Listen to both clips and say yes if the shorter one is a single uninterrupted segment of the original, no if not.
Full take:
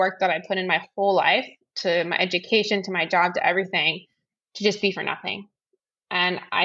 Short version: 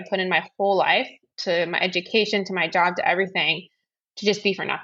yes